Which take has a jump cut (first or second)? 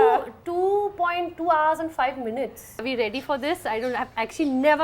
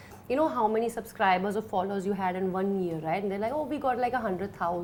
first